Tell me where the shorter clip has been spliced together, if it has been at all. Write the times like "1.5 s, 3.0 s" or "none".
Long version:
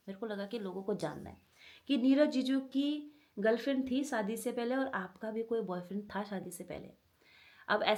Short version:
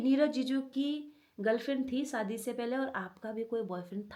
none